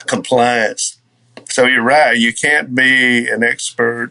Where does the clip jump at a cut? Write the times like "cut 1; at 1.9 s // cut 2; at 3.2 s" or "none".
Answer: cut 1; at 1.3 s